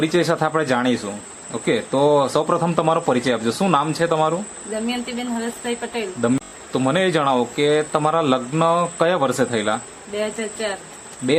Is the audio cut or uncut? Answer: cut